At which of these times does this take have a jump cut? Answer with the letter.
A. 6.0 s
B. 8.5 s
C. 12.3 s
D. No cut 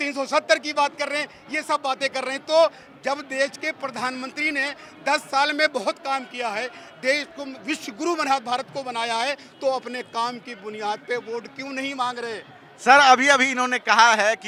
D